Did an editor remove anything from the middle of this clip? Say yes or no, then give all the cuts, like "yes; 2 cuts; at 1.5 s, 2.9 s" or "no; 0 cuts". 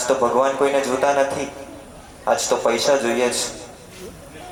no; 0 cuts